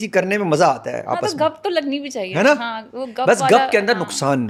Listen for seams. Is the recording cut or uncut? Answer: uncut